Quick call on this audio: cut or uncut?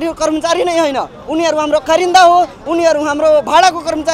uncut